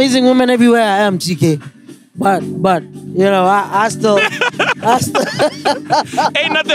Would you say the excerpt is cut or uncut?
uncut